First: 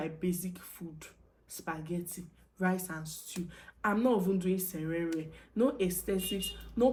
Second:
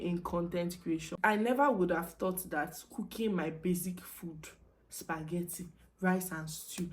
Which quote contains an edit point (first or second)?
second